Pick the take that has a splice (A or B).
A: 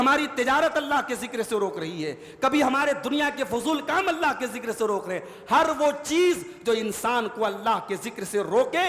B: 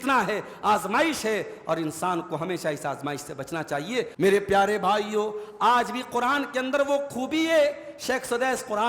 B